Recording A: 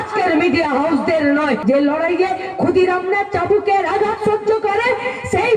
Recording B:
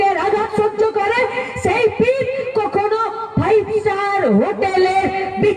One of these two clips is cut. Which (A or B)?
A